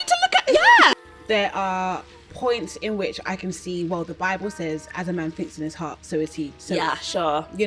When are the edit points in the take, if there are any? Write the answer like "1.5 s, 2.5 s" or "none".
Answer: 0.9 s